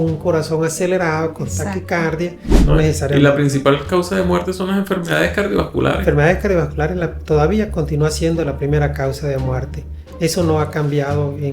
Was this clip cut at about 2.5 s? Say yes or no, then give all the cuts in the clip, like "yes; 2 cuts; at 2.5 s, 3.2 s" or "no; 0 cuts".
yes; 1 cut; at 2.5 s